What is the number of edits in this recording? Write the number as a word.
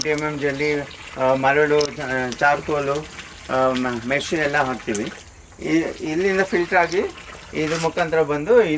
zero